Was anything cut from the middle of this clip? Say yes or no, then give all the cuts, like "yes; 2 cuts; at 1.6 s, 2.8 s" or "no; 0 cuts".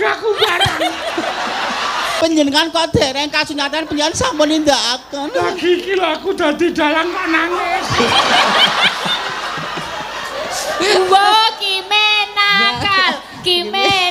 yes; 1 cut; at 2.1 s